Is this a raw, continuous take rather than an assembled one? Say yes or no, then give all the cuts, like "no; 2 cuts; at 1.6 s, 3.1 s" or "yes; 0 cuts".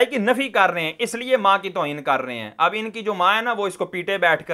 yes; 0 cuts